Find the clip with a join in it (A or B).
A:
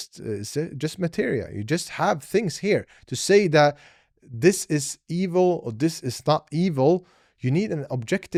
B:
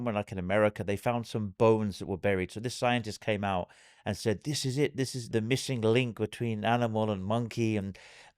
B